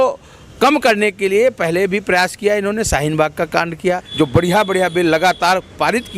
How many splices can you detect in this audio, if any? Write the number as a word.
one